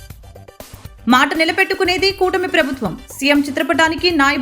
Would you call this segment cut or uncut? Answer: cut